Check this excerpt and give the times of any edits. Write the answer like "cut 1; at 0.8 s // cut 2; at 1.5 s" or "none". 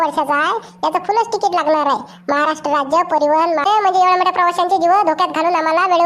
cut 1; at 3.7 s

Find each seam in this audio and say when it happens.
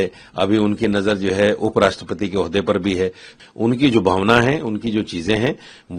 cut 1; at 3.3 s

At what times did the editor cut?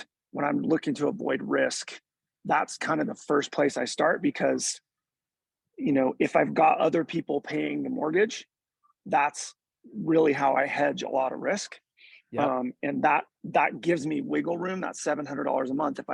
none

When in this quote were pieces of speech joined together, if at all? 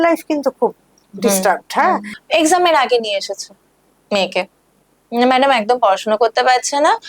cut 1; at 2.1 s

